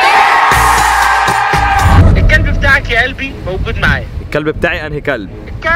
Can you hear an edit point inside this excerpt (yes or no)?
yes